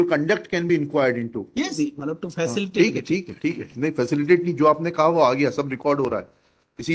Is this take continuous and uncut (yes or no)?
no